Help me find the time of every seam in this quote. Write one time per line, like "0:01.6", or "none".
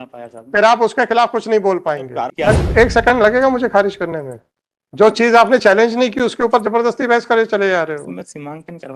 0:02.3